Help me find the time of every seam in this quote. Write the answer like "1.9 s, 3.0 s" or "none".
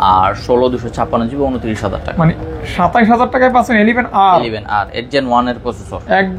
none